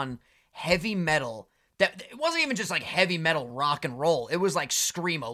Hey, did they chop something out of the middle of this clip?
no; 0 cuts

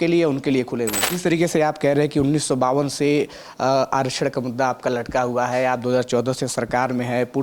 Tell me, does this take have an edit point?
yes; 1 cut; at 1.0 s

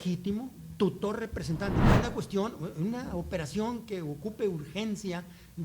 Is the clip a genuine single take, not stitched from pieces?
no; 1 cut; at 1.9 s

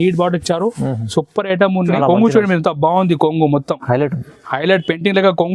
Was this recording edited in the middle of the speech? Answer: yes; 1 cut; at 2.0 s

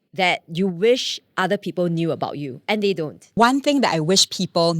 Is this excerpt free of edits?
no; 1 cut; at 3.4 s

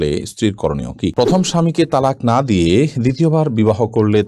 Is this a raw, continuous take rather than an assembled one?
no; 1 cut; at 1.1 s

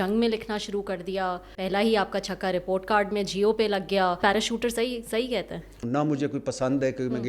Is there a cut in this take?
yes; 3 cuts; at 1.6 s, 4.2 s, 5.8 s

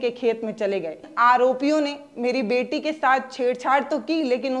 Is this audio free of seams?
no; 1 cut; at 1.1 s

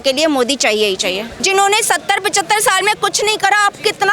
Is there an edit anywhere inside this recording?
yes; 1 cut; at 1.3 s

